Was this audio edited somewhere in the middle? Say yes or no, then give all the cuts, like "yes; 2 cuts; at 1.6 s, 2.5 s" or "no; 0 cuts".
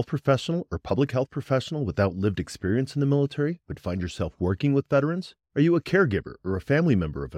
no; 0 cuts